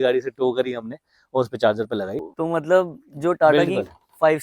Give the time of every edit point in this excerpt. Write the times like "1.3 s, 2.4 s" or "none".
2.2 s